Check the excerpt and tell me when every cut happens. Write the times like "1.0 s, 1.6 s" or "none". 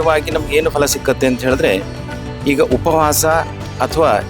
none